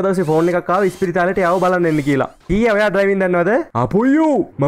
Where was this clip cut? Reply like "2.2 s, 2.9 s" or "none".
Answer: 2.4 s